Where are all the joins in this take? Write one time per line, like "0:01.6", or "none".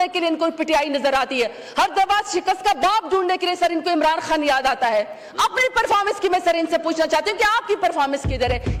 none